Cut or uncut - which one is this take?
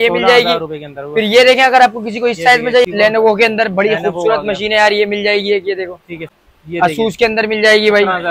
cut